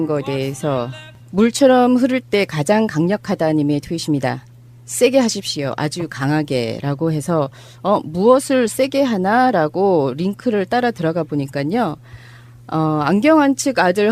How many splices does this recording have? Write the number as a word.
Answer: zero